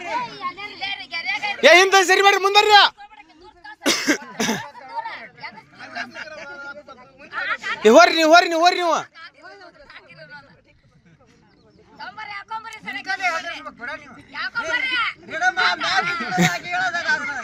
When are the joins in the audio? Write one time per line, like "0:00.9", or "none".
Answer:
none